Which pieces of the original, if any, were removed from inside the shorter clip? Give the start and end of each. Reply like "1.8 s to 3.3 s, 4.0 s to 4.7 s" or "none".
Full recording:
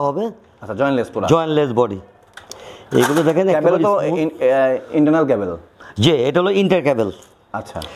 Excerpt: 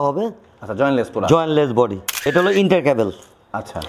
2.3 s to 6.3 s